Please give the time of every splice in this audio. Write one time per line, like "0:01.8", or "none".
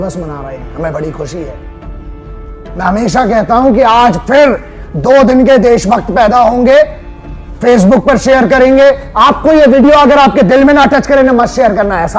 none